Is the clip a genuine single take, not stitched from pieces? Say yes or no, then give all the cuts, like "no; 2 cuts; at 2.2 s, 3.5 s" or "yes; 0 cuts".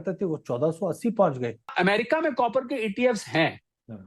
no; 1 cut; at 1.7 s